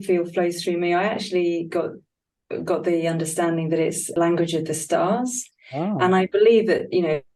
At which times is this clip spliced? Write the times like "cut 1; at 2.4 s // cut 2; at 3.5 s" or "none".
cut 1; at 4.0 s

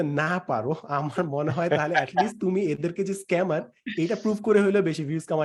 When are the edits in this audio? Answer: none

